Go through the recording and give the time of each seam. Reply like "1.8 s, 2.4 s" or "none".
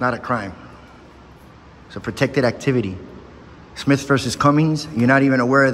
none